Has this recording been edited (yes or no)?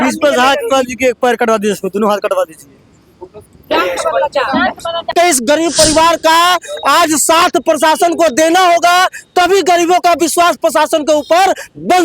yes